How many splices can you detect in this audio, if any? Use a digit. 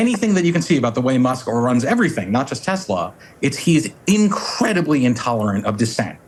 0